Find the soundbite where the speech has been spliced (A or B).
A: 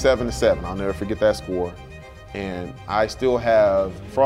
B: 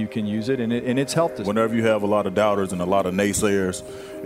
B